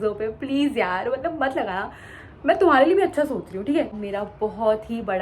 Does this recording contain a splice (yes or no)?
yes